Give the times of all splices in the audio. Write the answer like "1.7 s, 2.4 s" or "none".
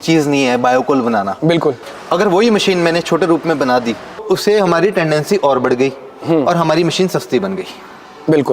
1.8 s, 4.2 s